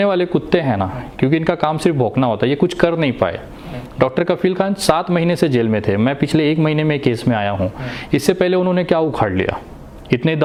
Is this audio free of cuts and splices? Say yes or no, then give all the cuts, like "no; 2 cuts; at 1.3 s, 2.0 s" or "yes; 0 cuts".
yes; 0 cuts